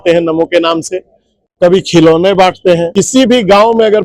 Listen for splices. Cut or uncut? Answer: cut